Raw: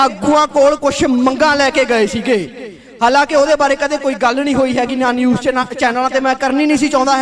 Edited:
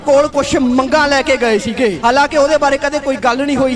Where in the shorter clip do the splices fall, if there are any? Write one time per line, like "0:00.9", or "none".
0:02.0